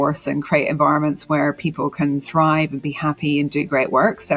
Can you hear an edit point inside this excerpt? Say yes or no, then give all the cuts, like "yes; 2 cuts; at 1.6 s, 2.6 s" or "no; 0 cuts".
no; 0 cuts